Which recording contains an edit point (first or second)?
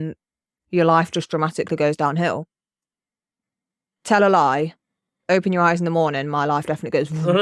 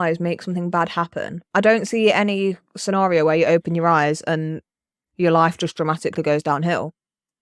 second